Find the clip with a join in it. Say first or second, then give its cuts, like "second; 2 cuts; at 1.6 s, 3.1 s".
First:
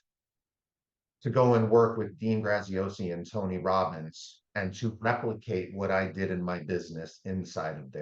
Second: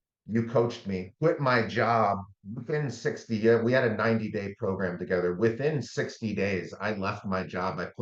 second; 2 cuts; at 1.1 s, 2.3 s